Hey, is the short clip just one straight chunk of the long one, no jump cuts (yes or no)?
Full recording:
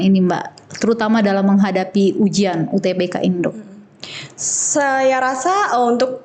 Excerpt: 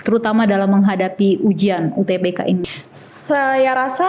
no